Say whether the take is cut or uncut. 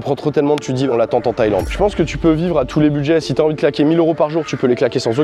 cut